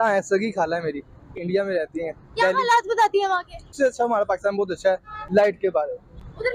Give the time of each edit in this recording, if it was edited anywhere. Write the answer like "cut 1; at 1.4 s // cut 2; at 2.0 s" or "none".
cut 1; at 1.4 s // cut 2; at 3.7 s